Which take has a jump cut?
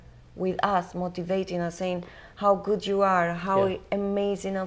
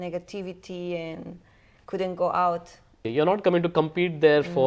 second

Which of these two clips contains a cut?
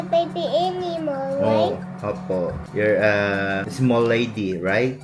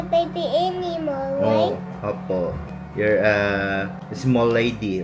first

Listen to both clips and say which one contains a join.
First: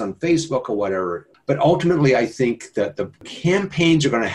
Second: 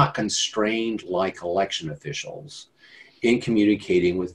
first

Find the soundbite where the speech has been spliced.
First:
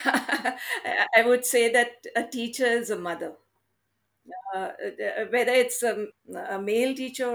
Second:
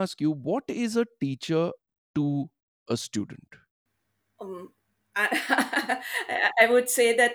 first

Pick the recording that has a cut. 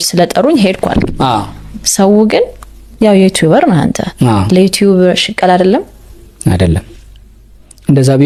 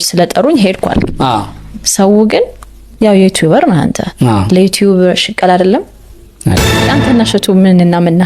second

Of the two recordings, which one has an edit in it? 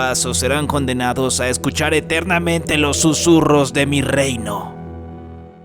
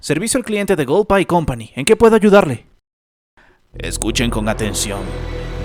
first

